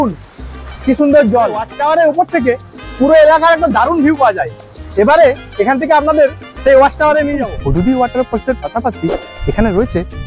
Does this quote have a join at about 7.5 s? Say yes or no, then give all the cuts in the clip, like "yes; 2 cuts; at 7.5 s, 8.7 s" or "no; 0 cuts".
yes; 2 cuts; at 1.7 s, 7.5 s